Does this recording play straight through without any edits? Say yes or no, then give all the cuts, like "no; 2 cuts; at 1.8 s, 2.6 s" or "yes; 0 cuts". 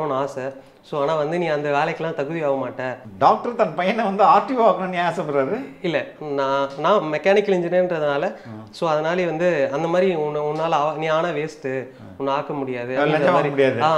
no; 1 cut; at 3.0 s